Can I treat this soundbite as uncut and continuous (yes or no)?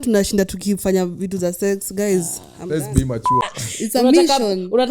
no